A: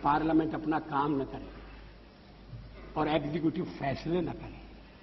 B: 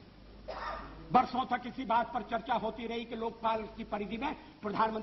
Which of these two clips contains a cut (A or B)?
A